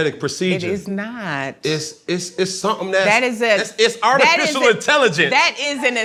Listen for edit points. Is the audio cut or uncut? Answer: uncut